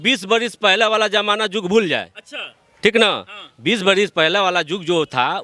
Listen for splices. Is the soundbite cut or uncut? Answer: uncut